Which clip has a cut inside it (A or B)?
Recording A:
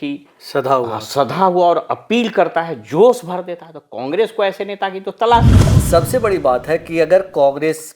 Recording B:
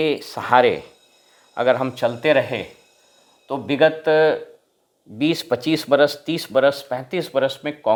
A